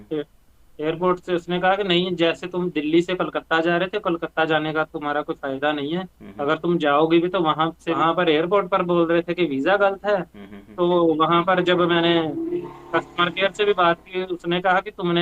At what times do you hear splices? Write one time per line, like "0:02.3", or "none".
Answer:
0:08.0